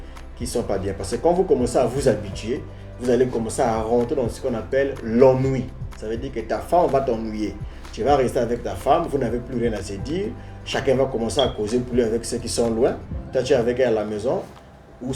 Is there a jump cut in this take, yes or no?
no